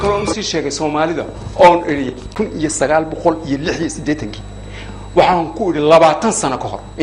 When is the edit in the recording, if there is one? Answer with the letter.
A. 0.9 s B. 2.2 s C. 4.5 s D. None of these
B